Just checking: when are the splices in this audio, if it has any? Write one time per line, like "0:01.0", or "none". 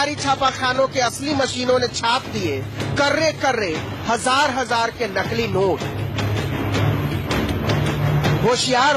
none